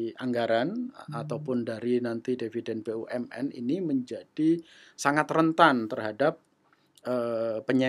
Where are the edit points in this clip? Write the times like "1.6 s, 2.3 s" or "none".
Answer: none